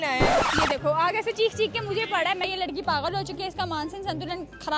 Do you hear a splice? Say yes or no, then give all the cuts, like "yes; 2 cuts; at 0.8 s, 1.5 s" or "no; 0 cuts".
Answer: yes; 1 cut; at 2.4 s